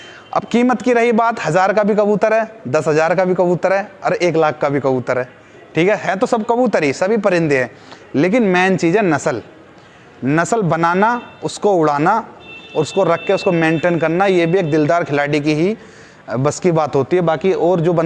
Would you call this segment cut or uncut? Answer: uncut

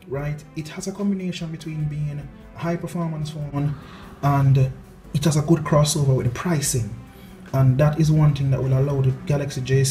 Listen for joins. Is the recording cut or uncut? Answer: cut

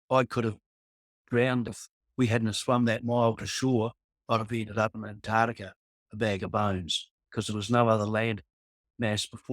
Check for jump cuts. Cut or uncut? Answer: cut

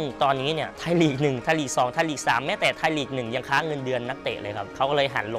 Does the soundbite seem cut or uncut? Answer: uncut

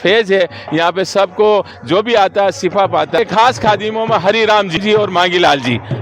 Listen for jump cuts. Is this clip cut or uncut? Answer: cut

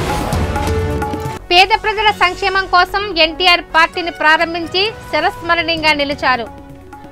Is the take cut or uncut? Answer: cut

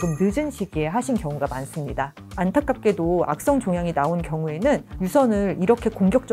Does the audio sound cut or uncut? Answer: cut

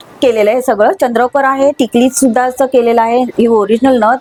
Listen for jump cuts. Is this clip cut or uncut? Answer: uncut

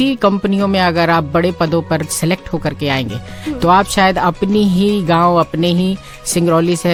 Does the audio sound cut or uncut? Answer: uncut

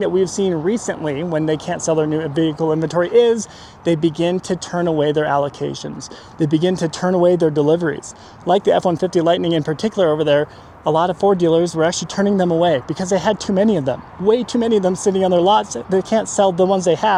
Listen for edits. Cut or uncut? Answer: uncut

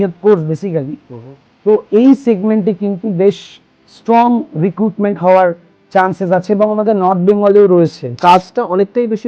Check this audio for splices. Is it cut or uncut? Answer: cut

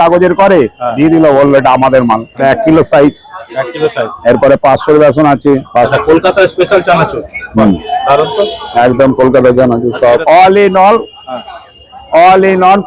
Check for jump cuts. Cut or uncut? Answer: cut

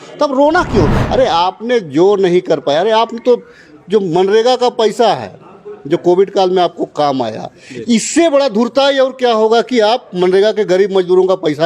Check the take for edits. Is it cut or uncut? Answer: cut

